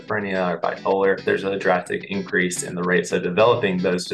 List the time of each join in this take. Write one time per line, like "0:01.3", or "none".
0:01.2